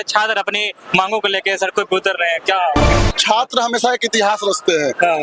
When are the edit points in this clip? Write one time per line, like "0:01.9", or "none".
0:03.1